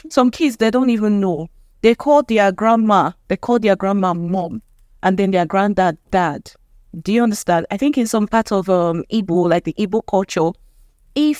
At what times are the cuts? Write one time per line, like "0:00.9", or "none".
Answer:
none